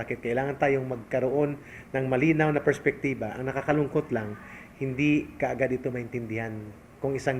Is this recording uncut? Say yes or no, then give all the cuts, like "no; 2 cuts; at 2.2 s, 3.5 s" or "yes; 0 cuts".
yes; 0 cuts